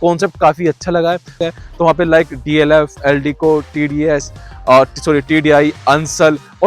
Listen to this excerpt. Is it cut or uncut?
cut